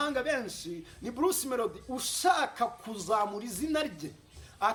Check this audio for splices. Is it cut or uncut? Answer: uncut